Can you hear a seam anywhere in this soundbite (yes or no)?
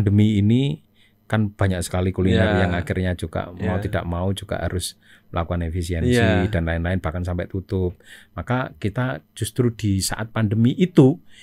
no